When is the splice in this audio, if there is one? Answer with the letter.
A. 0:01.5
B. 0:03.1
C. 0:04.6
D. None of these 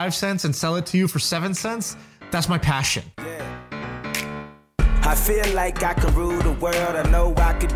B